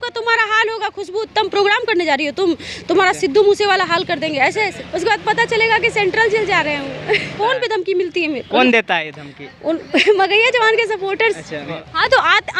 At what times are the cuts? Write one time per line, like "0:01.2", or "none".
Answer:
0:04.8
0:07.3
0:11.8